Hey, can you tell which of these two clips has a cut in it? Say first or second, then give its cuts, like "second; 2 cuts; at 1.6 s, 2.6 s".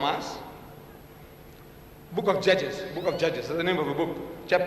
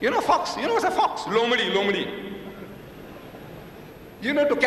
first; 1 cut; at 2.0 s